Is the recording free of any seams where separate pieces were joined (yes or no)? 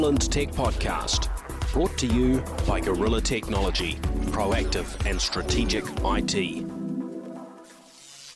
yes